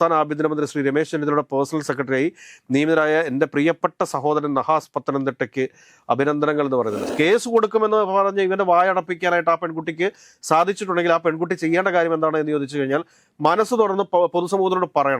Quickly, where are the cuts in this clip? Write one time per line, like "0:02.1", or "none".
0:07.0

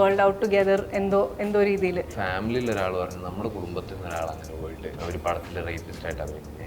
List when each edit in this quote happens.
0:02.2
0:05.0

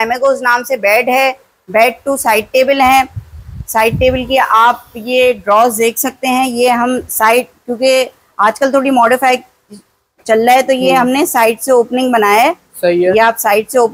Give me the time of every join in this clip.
none

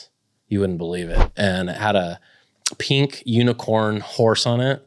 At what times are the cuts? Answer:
0:01.1

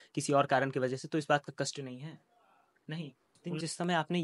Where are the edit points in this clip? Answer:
0:03.3

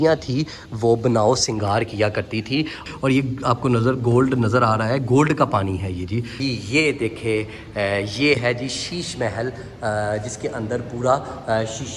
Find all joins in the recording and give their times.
0:02.8
0:06.3

